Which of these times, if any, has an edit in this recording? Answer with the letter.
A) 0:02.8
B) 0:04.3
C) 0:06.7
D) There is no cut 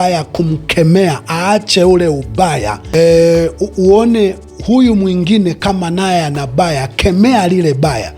A